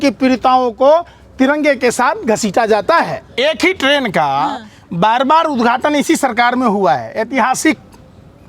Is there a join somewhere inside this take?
yes; 1 cut; at 3.2 s

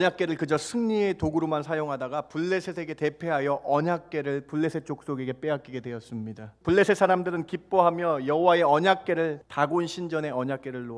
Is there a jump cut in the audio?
yes; 2 cuts; at 6.5 s, 9.4 s

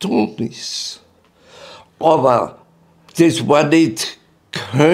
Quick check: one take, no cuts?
no; 1 cut; at 3.0 s

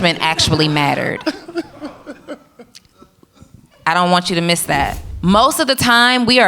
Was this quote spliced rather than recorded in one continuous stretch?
yes; 1 cut; at 5.1 s

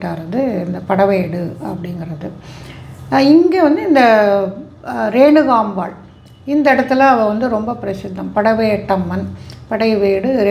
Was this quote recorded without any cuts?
yes; 0 cuts

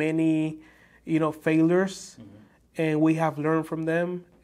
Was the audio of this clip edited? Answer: no; 0 cuts

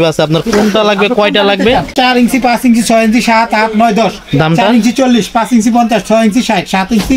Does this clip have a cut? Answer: yes; 1 cut; at 1.9 s

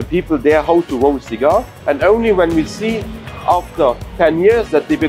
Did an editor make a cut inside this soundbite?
yes; 2 cuts; at 1.7 s, 4.1 s

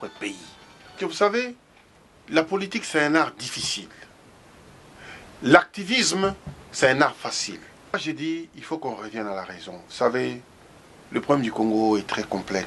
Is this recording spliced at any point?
yes; 2 cuts; at 1.1 s, 8.0 s

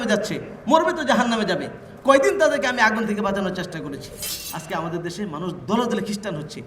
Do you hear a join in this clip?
yes; 1 cut; at 4.3 s

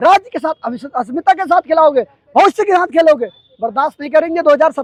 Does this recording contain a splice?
no; 0 cuts

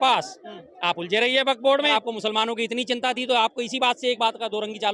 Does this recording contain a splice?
yes; 1 cut; at 1.9 s

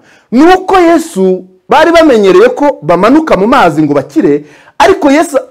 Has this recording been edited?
no; 0 cuts

